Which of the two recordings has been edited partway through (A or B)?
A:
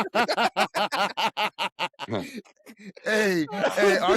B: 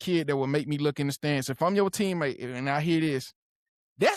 A